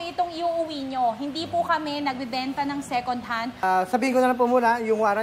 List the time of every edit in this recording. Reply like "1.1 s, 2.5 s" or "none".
3.5 s